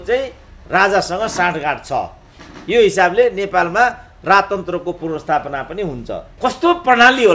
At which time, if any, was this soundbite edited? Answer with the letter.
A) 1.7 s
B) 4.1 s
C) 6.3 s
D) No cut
C